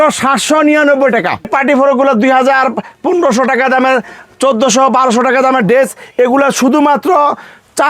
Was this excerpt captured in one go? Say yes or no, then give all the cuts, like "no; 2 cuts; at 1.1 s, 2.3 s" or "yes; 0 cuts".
no; 1 cut; at 1.5 s